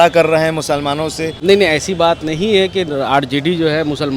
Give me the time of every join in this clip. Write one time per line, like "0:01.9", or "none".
0:01.3